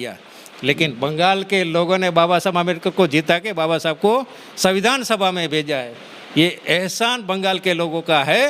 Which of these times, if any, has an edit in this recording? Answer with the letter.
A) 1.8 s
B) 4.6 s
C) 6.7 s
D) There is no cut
D